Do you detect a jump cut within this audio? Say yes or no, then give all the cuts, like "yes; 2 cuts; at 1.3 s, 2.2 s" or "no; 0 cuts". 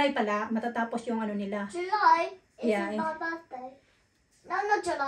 no; 0 cuts